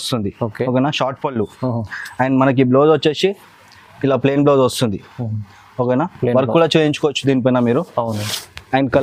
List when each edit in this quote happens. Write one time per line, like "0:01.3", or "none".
none